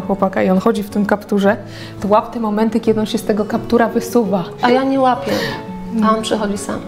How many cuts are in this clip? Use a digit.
1